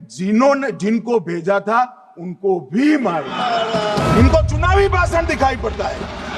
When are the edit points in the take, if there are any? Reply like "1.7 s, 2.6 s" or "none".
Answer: 4.0 s